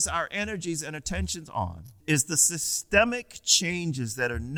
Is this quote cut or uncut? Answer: uncut